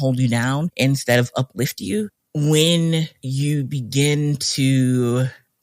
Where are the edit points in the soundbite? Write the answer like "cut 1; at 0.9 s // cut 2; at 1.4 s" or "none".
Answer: cut 1; at 2.1 s